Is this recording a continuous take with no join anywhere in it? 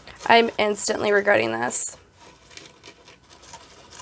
yes; 0 cuts

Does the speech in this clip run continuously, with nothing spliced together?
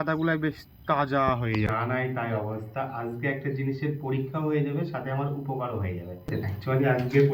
no; 2 cuts; at 1.7 s, 6.3 s

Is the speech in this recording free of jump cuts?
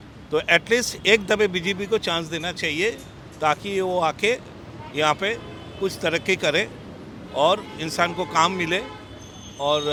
yes; 0 cuts

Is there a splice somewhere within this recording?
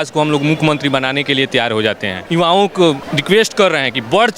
yes; 2 cuts; at 2.3 s, 3.1 s

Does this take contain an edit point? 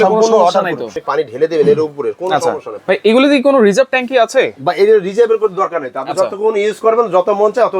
yes; 2 cuts; at 0.9 s, 2.7 s

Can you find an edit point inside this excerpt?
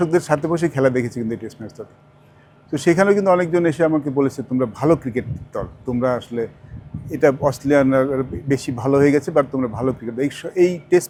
no; 0 cuts

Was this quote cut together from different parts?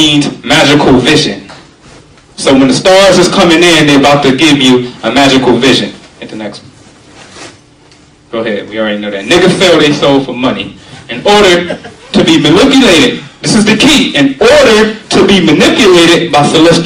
no; 0 cuts

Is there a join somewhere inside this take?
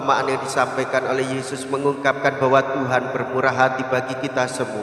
no; 0 cuts

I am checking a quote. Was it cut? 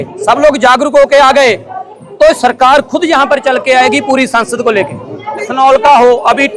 yes; 1 cut; at 5.5 s

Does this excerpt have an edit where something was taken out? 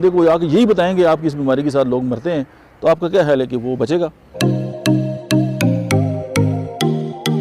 yes; 1 cut; at 4.2 s

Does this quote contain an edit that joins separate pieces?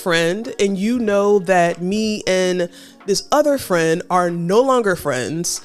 no; 0 cuts

